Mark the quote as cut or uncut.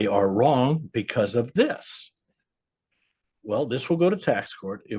uncut